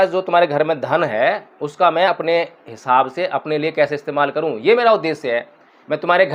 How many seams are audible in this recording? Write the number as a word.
zero